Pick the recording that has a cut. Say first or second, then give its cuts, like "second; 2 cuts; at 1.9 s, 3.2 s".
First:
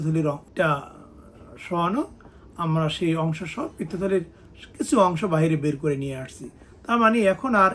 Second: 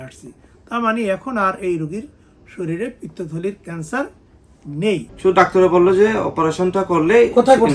second; 1 cut; at 5.1 s